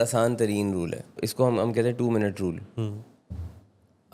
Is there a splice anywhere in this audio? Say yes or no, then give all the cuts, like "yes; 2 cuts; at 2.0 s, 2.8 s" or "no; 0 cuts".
yes; 1 cut; at 1.2 s